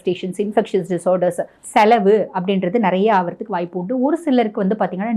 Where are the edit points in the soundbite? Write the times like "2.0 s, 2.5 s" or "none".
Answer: 1.5 s